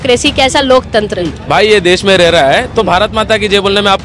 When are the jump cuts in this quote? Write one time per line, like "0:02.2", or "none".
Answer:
0:01.3

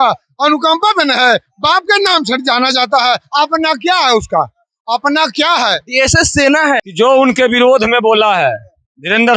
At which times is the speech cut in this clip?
0:06.9

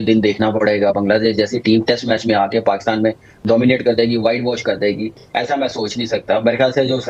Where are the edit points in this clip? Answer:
none

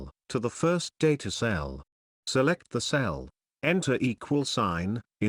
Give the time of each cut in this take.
0:01.8
0:03.3

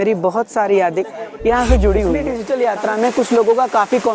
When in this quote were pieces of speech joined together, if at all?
0:02.3

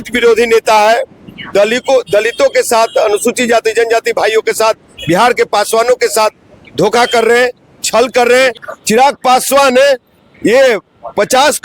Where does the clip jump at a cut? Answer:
0:08.6

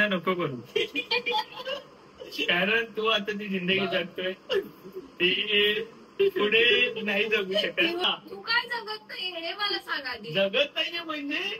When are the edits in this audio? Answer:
0:08.0

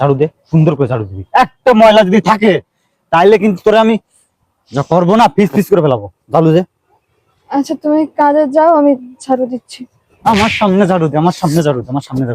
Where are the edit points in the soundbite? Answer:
none

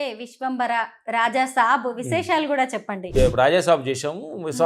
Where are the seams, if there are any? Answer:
0:03.0

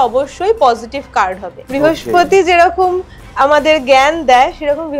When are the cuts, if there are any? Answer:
0:01.6

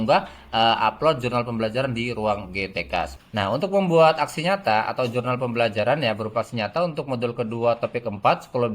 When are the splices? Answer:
0:03.2

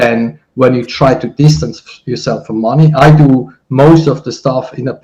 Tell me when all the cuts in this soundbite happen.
none

